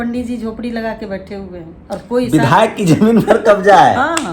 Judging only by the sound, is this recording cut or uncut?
cut